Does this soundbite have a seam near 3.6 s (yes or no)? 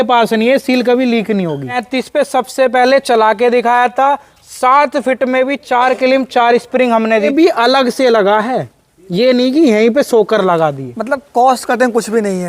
no